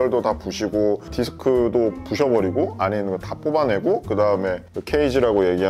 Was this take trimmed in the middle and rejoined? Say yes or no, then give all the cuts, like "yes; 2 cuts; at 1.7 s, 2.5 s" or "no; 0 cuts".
no; 0 cuts